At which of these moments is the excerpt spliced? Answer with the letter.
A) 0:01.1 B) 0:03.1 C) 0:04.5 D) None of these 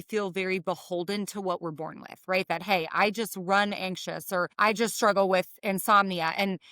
C